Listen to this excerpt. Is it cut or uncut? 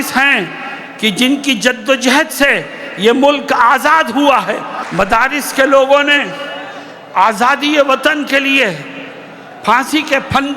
cut